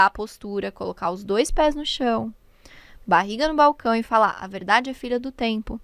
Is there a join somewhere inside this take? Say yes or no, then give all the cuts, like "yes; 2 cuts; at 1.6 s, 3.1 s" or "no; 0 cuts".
no; 0 cuts